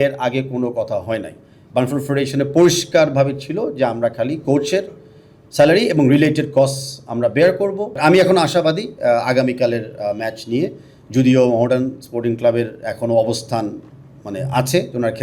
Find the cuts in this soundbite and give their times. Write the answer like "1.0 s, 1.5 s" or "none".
8.0 s